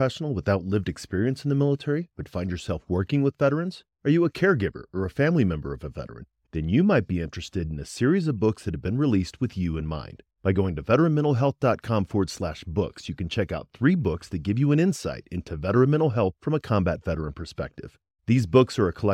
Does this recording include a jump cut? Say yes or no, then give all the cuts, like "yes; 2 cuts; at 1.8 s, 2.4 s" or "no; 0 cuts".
no; 0 cuts